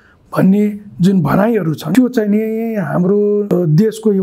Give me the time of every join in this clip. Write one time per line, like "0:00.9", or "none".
0:01.8
0:03.5